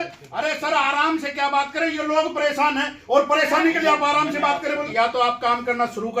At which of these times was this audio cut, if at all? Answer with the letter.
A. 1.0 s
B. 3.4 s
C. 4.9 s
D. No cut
C